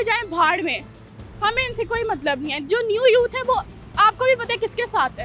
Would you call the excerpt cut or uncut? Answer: uncut